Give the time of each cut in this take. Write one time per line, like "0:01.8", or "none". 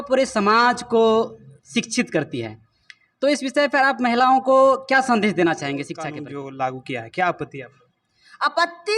0:06.2